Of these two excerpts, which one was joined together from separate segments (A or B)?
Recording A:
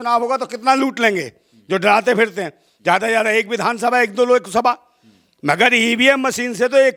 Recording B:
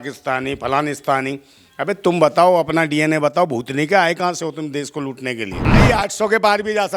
B